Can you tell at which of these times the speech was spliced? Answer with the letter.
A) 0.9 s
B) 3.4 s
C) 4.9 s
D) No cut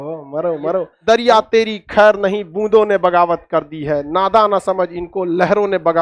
A